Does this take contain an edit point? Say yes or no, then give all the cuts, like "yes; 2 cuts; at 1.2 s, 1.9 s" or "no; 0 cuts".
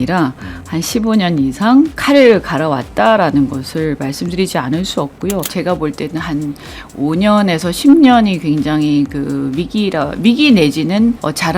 yes; 1 cut; at 5.5 s